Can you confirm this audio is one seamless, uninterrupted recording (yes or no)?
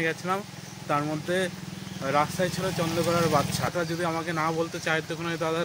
no